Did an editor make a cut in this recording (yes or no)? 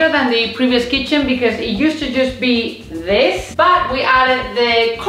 yes